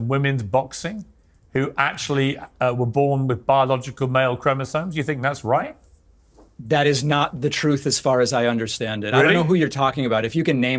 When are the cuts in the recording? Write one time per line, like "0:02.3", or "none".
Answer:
none